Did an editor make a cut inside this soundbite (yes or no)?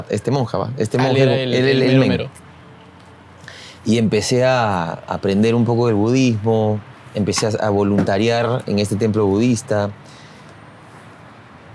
no